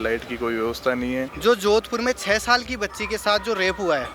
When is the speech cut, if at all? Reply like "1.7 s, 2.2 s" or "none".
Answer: 1.3 s